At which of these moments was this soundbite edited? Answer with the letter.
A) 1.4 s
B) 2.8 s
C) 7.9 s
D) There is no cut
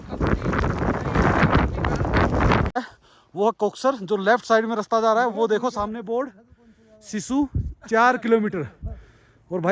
B